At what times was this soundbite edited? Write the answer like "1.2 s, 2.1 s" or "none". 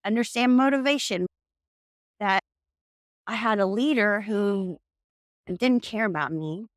1.3 s, 2.4 s